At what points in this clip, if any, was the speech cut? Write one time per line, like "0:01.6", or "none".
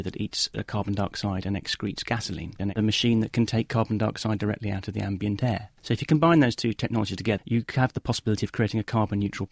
0:02.7
0:07.4